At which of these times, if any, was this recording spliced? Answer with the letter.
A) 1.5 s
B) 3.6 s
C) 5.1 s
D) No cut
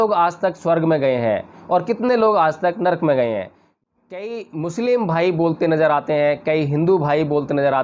B